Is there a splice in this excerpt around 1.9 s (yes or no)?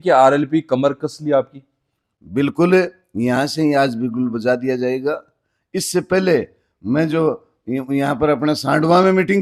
no